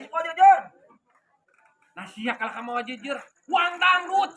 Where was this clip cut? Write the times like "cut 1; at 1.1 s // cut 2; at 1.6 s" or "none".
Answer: none